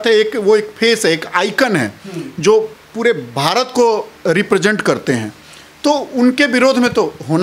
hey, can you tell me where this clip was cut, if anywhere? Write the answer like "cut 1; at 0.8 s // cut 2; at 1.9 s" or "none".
none